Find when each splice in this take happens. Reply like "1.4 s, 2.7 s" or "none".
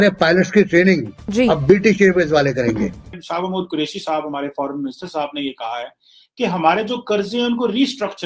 3.1 s